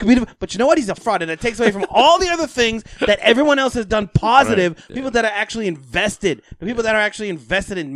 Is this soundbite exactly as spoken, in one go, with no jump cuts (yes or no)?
no